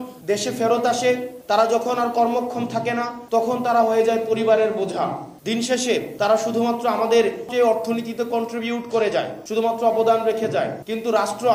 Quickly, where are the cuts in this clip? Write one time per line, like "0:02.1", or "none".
0:05.3
0:07.5